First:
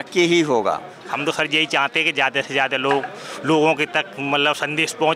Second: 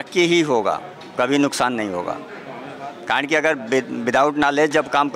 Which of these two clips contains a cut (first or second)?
first